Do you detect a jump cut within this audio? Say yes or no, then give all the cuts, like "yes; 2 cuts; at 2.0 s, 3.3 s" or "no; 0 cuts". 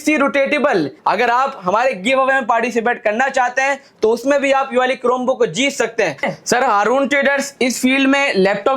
yes; 2 cuts; at 0.9 s, 6.3 s